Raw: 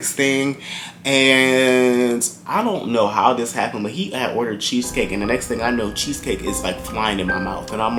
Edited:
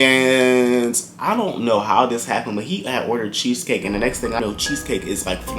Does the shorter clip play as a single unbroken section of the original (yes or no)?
no